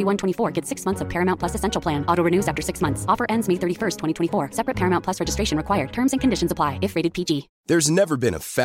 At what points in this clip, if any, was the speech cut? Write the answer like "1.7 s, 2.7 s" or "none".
7.5 s